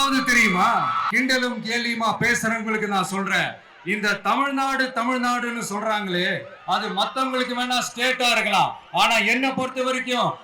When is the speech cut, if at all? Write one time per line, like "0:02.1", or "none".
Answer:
0:01.0